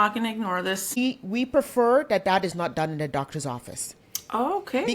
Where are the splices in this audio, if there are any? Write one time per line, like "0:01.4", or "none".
0:01.0